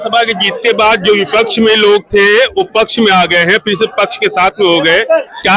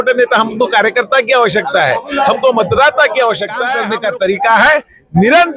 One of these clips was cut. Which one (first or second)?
second